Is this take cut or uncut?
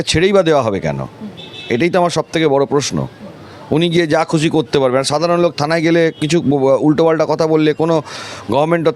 uncut